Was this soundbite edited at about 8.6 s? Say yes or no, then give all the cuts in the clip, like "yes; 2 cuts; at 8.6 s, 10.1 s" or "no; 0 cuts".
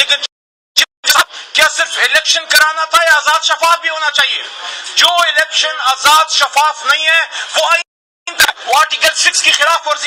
no; 0 cuts